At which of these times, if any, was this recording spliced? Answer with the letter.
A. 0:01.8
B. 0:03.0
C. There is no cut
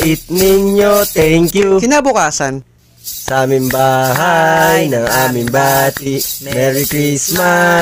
A